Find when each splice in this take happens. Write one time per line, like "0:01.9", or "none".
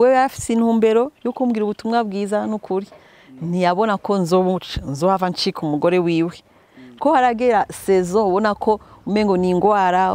0:06.8